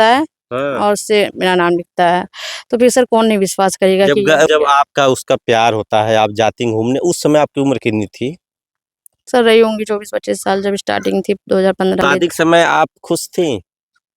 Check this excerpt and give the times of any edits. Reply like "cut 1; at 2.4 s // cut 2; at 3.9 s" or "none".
cut 1; at 4.5 s // cut 2; at 12.0 s